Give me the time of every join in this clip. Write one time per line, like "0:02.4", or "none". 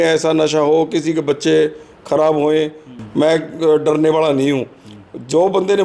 0:02.9